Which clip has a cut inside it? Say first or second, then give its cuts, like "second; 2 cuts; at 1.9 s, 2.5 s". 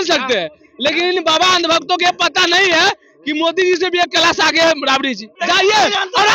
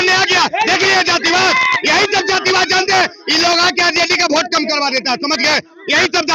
first; 1 cut; at 5.3 s